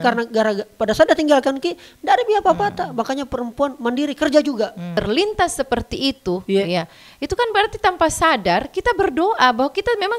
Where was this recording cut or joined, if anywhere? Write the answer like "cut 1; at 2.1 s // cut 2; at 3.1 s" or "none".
cut 1; at 4.9 s